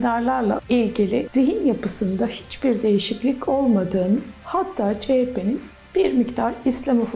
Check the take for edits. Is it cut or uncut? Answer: uncut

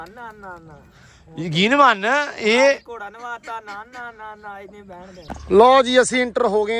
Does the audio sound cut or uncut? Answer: cut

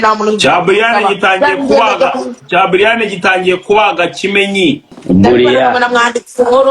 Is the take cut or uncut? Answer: cut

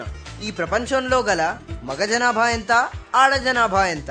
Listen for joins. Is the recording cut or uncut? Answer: uncut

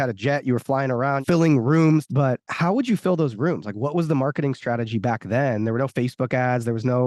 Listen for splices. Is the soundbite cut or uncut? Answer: cut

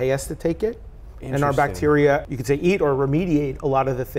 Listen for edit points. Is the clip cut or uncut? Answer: cut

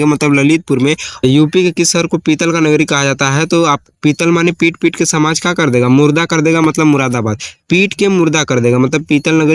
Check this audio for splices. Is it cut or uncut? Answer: cut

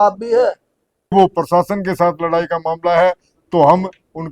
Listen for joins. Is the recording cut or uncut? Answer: cut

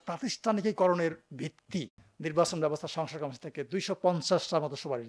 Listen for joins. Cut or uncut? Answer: cut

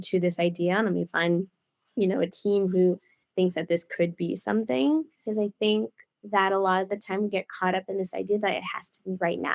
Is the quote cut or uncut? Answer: cut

